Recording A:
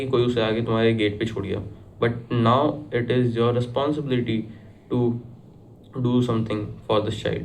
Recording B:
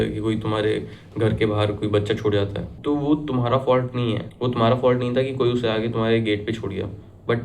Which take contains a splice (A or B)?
B